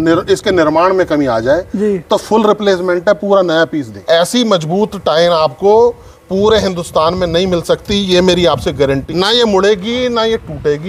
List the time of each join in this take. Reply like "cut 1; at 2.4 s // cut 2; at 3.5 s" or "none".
cut 1; at 3.9 s // cut 2; at 9.0 s